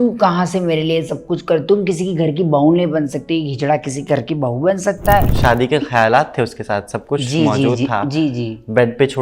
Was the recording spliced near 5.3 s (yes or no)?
yes